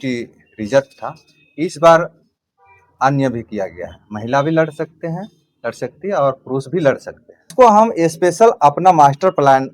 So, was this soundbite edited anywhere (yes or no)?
yes